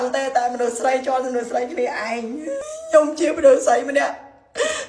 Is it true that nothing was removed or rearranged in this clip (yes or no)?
no